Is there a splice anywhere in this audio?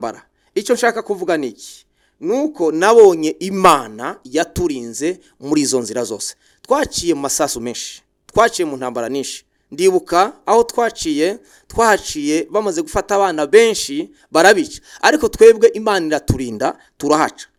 no; 0 cuts

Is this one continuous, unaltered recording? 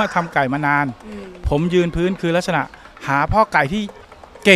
yes; 0 cuts

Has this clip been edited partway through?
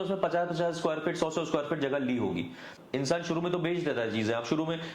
yes; 1 cut; at 2.7 s

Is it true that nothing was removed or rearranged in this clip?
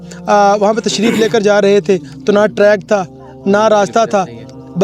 yes; 0 cuts

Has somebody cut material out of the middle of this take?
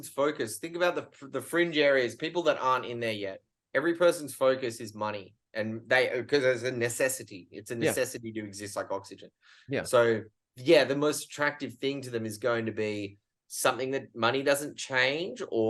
no; 0 cuts

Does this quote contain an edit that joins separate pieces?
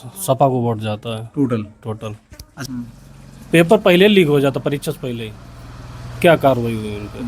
yes; 1 cut; at 2.5 s

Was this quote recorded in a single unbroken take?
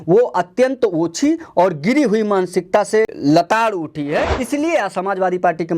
no; 2 cuts; at 3.1 s, 4.4 s

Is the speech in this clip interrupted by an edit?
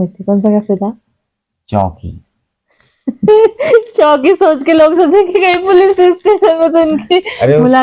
no; 0 cuts

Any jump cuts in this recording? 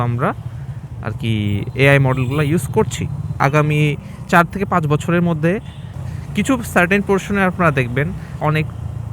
yes; 1 cut; at 3.4 s

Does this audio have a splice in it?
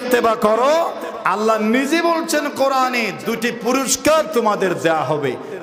no; 0 cuts

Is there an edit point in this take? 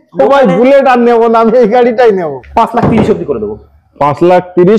yes; 1 cut; at 2.4 s

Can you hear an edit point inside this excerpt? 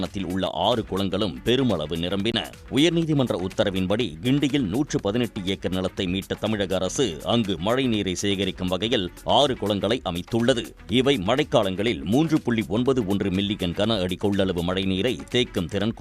yes; 1 cut; at 2.5 s

